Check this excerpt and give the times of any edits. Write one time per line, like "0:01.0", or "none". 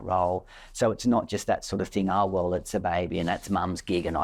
none

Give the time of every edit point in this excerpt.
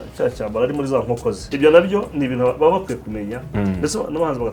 0:01.5

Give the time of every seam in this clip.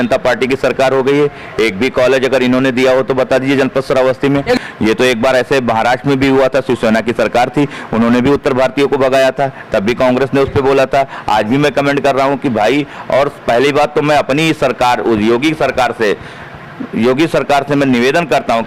0:04.6

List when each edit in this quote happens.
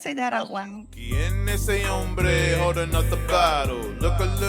0:01.1

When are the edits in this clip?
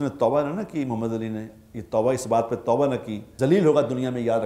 0:03.2

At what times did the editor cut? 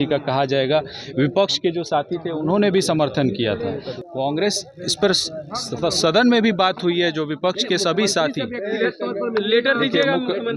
0:03.9

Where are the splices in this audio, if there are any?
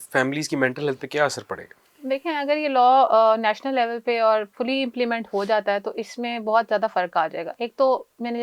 none

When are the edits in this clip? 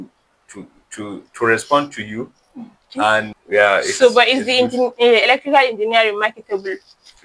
0:03.4

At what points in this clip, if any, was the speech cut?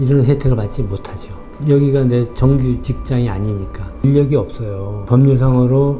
0:02.8
0:04.0

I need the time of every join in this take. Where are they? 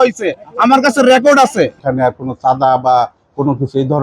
0:01.8

